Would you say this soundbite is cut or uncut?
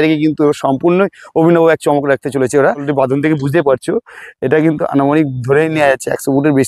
cut